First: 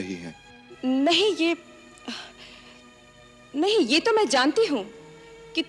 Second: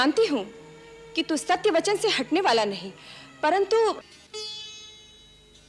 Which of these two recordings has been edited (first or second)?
second